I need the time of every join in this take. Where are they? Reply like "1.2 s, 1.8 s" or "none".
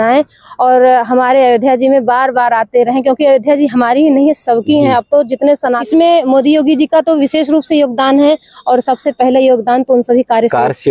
5.8 s

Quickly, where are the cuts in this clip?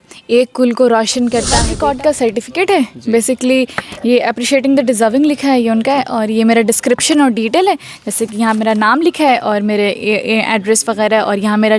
1.6 s

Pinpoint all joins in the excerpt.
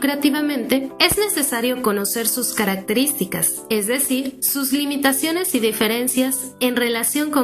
0.9 s, 3.5 s, 4.4 s

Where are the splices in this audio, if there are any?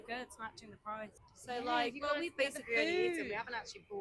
1.3 s

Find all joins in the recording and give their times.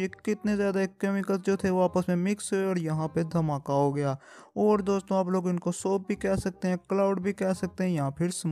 none

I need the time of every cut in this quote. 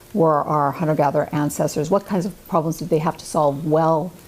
3.3 s

